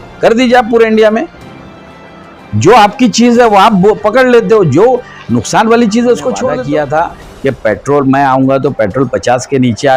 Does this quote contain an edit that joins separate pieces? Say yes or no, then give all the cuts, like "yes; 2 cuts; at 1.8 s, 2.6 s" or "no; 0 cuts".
yes; 1 cut; at 6.5 s